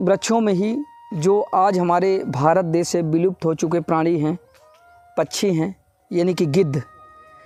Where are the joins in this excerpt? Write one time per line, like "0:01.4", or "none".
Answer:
none